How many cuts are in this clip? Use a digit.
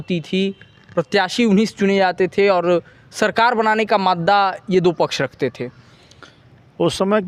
0